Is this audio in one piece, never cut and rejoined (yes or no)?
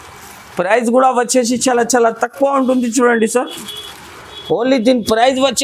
yes